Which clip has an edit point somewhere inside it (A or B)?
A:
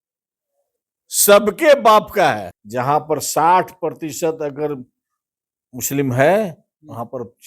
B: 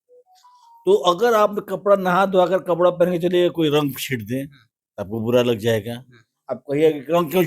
A